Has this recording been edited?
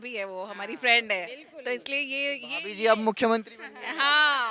no; 0 cuts

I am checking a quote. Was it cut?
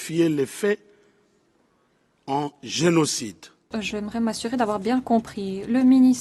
yes; 1 cut; at 3.8 s

